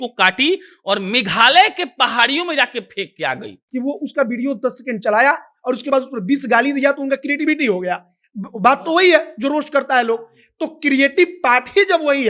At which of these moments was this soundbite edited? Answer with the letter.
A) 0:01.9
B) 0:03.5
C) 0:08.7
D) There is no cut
B